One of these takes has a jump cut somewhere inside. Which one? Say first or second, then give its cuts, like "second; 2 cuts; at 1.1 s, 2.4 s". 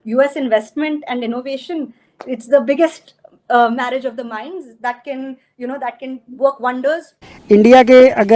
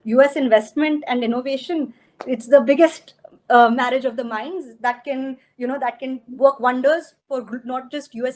first; 1 cut; at 7.3 s